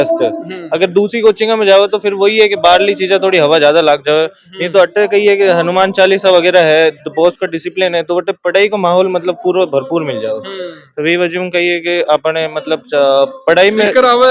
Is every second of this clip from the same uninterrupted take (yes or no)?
yes